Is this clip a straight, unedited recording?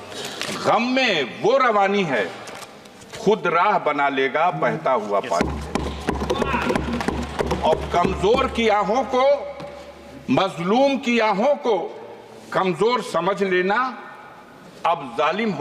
yes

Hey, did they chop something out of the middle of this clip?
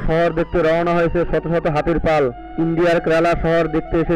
yes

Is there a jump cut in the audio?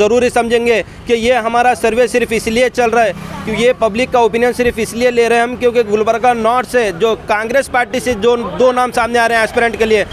no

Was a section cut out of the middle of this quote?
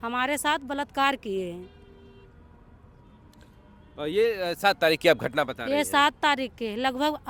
no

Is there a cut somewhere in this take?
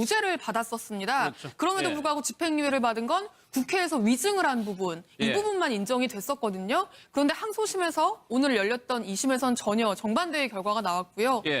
no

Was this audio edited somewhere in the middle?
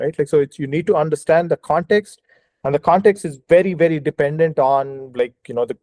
no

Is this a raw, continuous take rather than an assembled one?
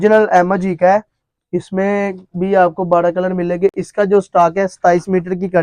yes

